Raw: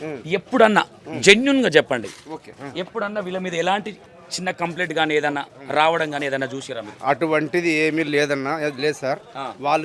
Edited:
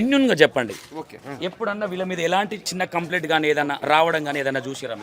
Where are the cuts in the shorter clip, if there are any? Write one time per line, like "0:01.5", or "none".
0:02.6
0:03.8